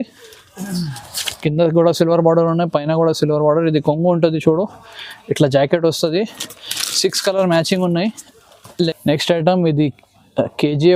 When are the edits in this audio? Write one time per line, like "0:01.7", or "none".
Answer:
0:08.9

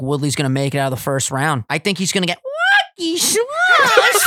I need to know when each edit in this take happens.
0:01.6

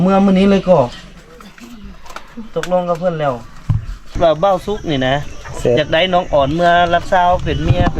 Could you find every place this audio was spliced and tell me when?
0:04.2

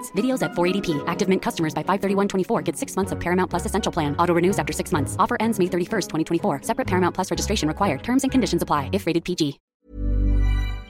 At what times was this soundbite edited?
0:09.6

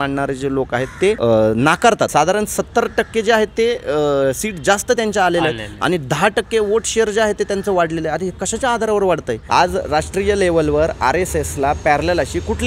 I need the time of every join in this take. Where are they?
0:01.2
0:02.1
0:09.3

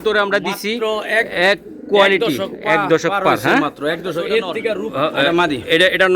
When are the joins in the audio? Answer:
0:04.8

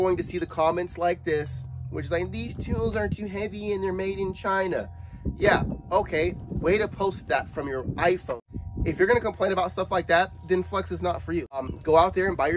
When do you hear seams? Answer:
0:08.3
0:11.6

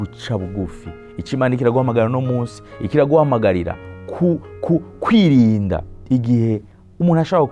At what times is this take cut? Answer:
none

